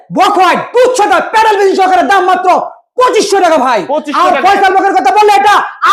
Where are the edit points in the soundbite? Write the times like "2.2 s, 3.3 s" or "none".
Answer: none